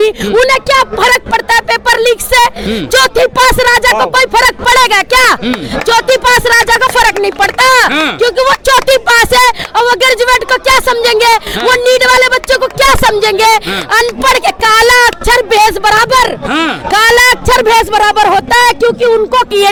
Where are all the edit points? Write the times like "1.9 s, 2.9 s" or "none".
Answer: none